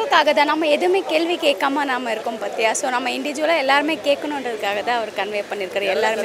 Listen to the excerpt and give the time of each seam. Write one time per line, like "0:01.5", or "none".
none

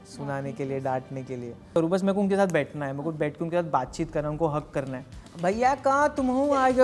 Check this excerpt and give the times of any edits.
0:01.8
0:05.2

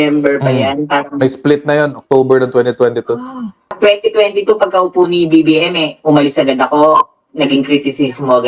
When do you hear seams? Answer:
0:03.7

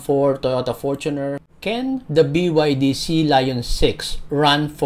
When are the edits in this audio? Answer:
0:01.4

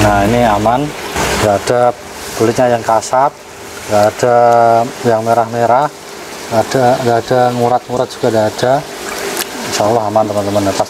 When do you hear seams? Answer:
0:01.2

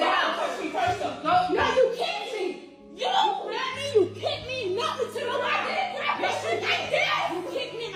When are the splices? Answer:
none

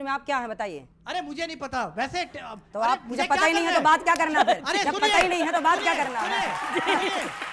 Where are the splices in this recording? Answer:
none

